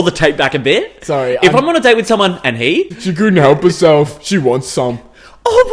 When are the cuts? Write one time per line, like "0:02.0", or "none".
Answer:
0:02.9